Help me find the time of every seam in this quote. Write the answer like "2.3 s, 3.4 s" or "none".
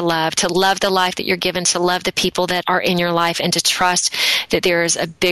2.6 s